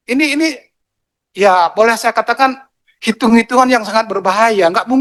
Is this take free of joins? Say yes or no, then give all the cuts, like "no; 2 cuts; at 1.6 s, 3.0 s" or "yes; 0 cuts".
yes; 0 cuts